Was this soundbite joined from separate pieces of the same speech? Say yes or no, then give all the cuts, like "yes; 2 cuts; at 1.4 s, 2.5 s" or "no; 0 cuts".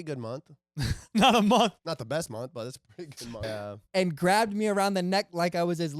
yes; 1 cut; at 3.4 s